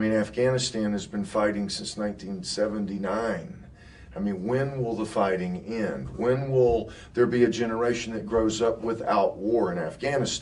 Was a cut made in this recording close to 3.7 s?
no; 0 cuts

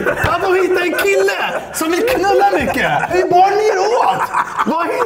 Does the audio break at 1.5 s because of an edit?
no; 1 cut; at 3.1 s

